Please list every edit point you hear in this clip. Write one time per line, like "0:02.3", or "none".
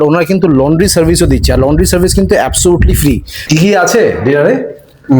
0:03.3